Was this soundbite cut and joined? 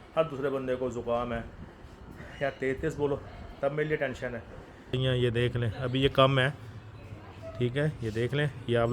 yes; 1 cut; at 4.9 s

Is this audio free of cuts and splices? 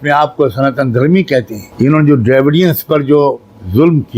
no; 1 cut; at 1.6 s

